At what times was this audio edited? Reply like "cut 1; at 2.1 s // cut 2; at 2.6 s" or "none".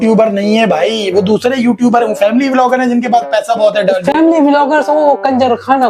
none